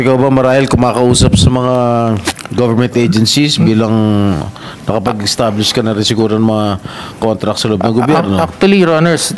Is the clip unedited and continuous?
yes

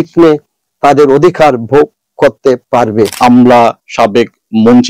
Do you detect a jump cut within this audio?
yes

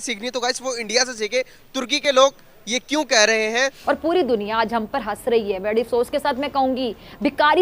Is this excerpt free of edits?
no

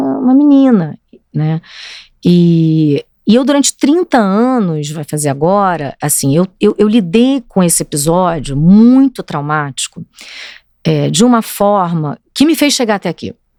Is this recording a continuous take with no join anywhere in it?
yes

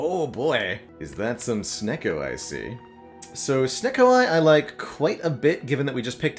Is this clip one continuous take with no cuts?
yes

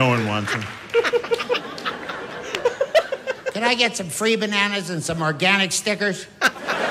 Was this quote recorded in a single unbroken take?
yes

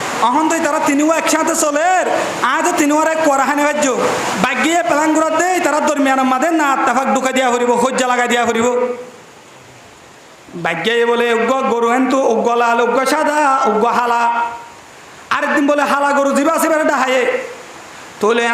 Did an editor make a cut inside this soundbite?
yes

